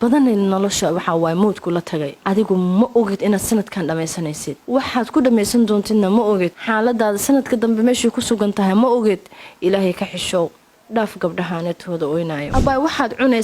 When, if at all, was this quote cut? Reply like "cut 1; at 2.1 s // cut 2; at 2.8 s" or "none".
cut 1; at 2.1 s // cut 2; at 4.5 s // cut 3; at 6.6 s // cut 4; at 12.5 s